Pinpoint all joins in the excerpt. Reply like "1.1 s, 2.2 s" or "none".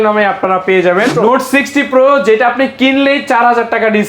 1.1 s